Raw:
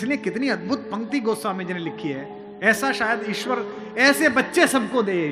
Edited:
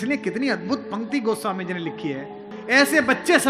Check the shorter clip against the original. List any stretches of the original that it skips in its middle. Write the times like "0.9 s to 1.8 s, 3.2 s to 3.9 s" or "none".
2.5 s to 3.8 s